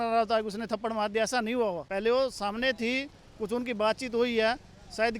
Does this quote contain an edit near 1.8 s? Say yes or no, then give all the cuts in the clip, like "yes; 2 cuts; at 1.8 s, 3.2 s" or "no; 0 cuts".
yes; 1 cut; at 1.8 s